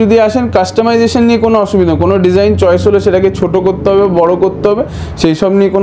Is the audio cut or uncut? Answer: uncut